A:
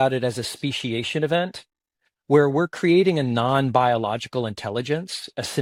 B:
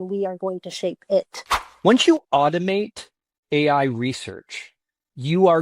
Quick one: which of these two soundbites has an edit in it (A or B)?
B